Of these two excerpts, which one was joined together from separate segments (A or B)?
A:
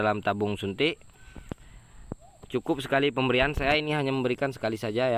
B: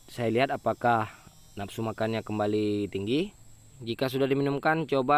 B